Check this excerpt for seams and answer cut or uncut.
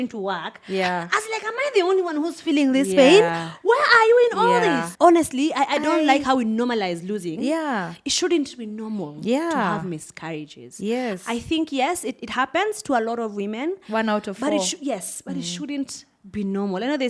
cut